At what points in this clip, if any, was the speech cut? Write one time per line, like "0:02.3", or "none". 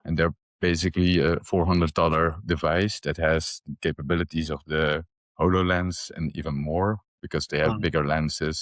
none